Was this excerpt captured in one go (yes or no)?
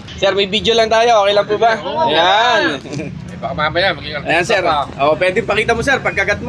yes